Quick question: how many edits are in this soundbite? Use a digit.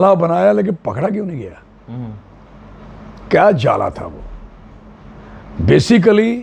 0